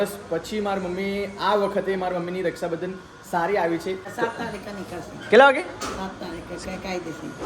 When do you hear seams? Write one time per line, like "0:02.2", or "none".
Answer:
0:04.1